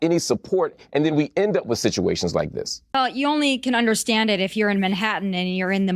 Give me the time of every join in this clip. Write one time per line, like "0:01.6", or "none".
0:02.9

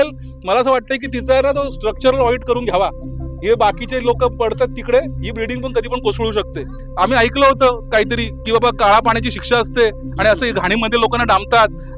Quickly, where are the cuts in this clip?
0:06.8

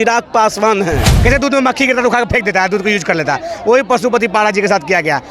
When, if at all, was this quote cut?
0:01.1

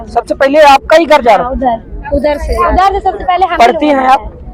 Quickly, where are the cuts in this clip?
none

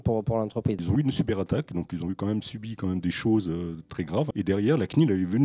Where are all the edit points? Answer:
0:00.8
0:04.3

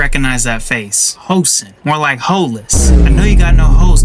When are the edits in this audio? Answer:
none

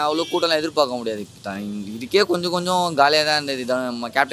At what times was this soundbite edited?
none

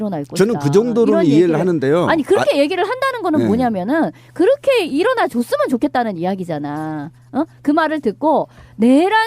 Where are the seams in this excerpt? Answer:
0:03.8

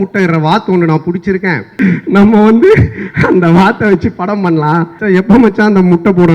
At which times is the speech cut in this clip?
0:01.7
0:05.0

